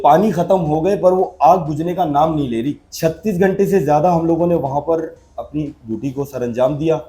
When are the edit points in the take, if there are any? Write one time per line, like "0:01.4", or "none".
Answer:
0:02.8